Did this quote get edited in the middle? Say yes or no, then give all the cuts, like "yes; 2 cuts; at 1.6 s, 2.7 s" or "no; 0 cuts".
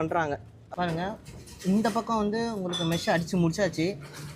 yes; 1 cut; at 0.9 s